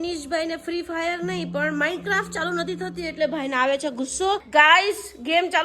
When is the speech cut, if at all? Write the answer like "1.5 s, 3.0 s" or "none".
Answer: 4.4 s